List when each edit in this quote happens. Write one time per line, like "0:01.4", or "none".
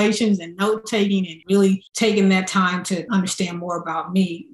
0:01.3
0:01.9
0:03.1